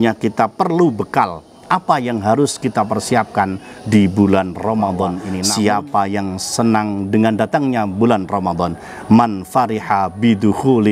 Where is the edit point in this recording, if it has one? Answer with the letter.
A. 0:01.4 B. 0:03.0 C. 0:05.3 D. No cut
C